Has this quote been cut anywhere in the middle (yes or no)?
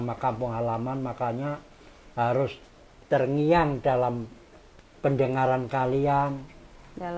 no